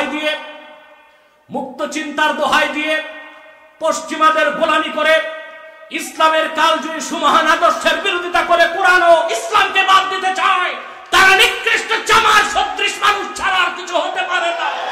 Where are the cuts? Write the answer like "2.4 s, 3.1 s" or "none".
none

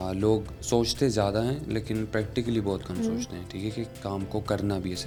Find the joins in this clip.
none

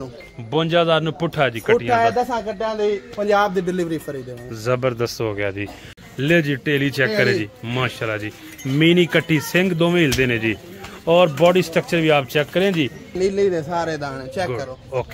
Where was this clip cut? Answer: 5.9 s, 13.1 s

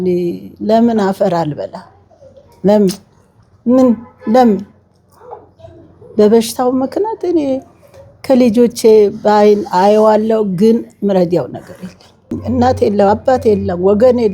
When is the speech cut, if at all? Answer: 12.4 s

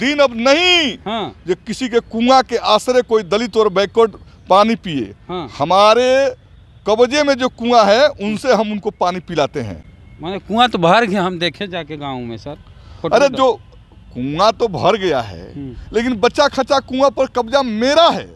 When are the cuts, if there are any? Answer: none

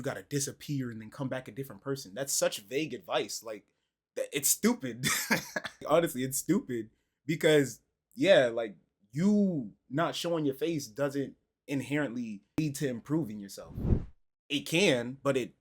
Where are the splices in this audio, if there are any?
5.8 s, 12.6 s

